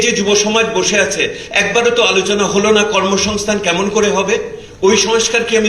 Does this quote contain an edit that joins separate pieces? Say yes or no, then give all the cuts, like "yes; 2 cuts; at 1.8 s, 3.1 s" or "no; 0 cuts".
no; 0 cuts